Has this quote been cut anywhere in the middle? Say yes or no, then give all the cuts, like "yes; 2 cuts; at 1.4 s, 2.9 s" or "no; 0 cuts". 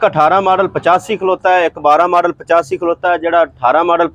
no; 0 cuts